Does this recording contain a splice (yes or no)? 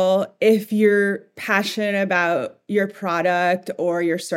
no